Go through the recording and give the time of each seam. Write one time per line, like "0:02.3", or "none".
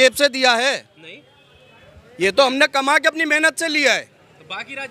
none